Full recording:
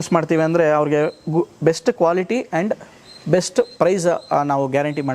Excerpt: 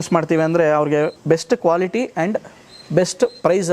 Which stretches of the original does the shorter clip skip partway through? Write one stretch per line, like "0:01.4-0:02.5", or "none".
0:01.2-0:01.5